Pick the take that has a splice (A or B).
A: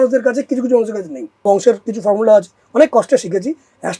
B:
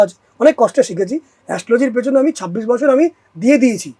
A